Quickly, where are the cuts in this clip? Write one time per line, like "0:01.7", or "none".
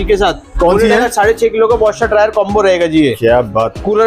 none